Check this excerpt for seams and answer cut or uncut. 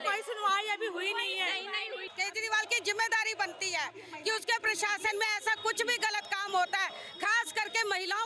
cut